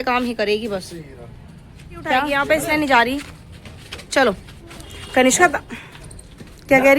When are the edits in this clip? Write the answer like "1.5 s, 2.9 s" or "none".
2.3 s

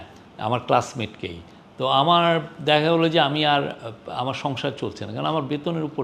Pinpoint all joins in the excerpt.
none

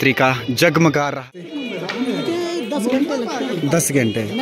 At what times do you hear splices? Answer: 1.4 s

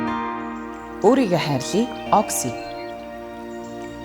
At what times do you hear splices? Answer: 1.0 s

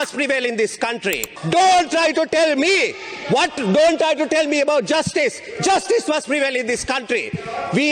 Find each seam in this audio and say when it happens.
1.3 s

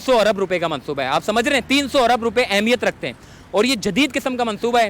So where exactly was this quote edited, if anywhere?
none

